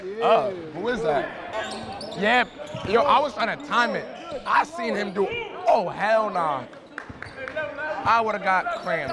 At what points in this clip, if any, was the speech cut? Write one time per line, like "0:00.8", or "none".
0:01.5